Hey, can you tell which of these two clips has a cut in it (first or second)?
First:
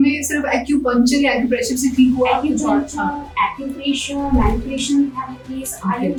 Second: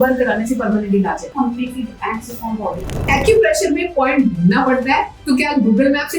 second